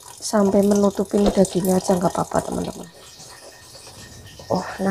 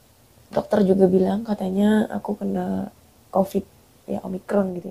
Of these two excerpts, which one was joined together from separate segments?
first; 1 cut; at 2.7 s

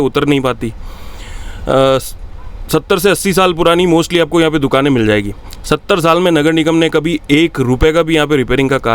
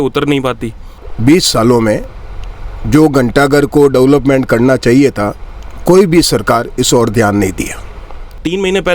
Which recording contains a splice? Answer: second; 2 cuts; at 1.0 s, 7.9 s

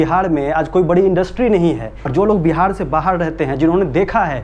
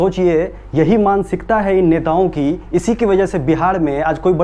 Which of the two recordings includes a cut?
first; 1 cut; at 2.0 s

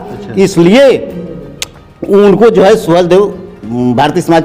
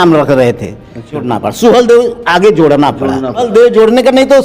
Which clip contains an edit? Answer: second; 2 cuts; at 1.3 s, 3.4 s

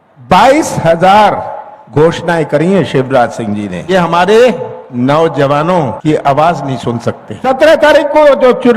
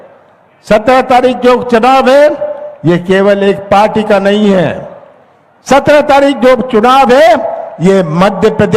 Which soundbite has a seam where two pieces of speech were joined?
first; 3 cuts; at 3.9 s, 6.0 s, 7.3 s

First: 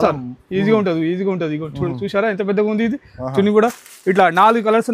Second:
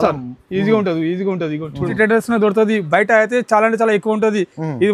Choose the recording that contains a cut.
second; 1 cut; at 1.9 s

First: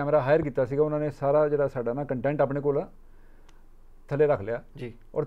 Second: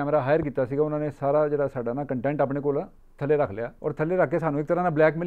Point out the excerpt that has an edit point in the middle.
second; 2 cuts; at 3.0 s, 3.7 s

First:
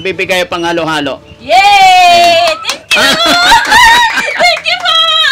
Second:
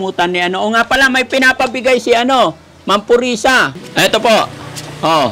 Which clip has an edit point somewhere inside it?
second; 1 cut; at 3.8 s

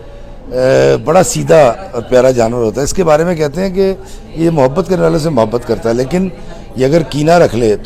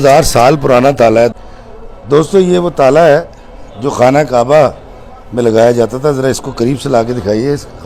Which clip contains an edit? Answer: second; 1 cut; at 1.5 s

